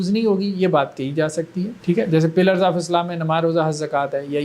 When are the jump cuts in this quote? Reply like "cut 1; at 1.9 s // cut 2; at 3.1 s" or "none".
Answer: cut 1; at 1.8 s